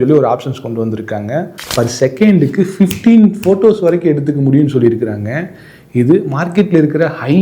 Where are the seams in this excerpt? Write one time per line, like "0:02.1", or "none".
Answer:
0:01.6

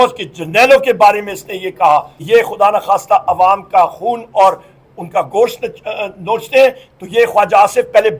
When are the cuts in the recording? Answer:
0:02.1

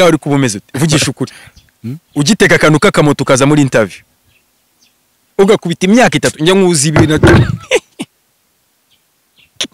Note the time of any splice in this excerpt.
none

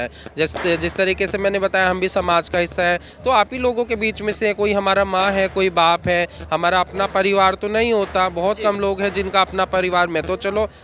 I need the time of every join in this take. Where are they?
none

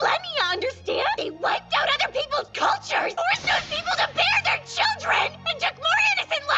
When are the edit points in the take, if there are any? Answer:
0:01.2
0:03.1

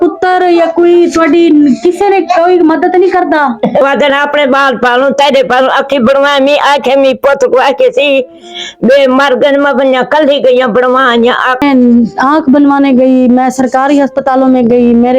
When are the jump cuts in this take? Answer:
0:03.8
0:11.6

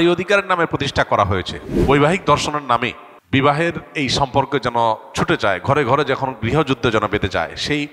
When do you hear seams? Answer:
0:01.6

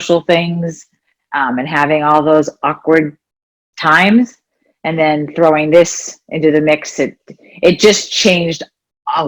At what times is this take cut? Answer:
none

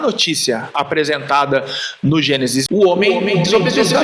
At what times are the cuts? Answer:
0:02.6

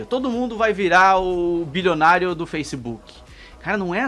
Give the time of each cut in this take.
none

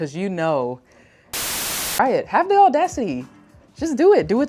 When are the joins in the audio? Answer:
0:01.4

